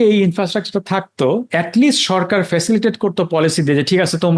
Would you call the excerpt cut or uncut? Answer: uncut